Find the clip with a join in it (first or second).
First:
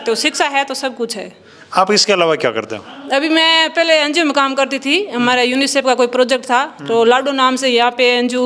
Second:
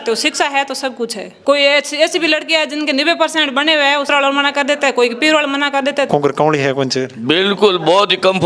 second